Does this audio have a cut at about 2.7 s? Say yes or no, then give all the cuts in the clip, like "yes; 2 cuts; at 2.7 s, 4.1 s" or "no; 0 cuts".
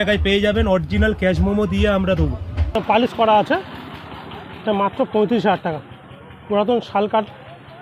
yes; 1 cut; at 2.7 s